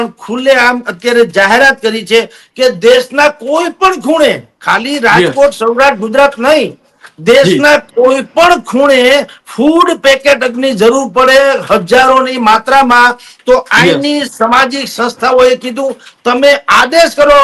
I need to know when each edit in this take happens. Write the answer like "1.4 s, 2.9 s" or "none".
none